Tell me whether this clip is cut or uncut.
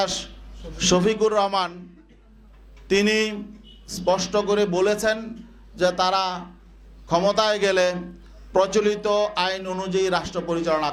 uncut